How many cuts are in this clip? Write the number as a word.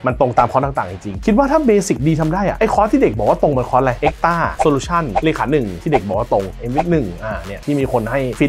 two